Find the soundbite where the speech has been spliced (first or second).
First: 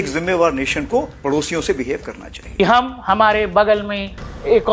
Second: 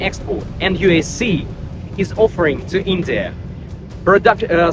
first